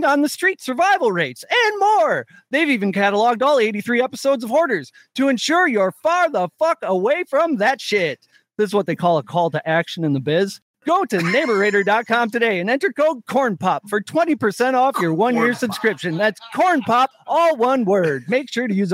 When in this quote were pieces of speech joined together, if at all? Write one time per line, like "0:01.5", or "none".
0:10.7
0:17.2

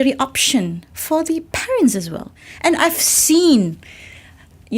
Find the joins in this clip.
0:02.4

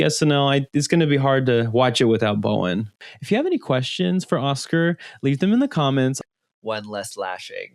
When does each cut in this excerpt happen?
0:03.0
0:06.2

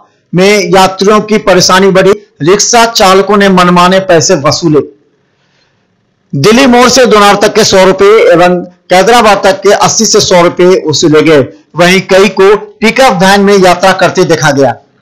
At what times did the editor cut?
0:02.2

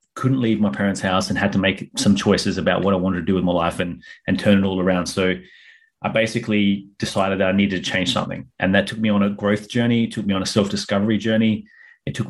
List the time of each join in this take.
none

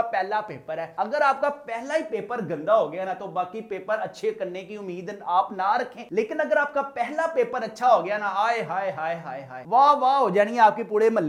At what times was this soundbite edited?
none

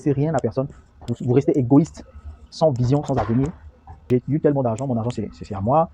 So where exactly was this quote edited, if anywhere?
0:04.0

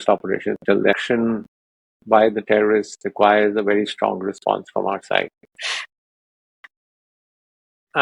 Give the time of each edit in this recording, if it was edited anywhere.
0:01.0

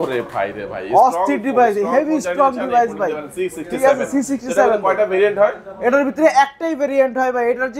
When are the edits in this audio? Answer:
none

